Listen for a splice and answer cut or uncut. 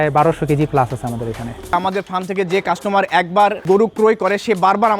cut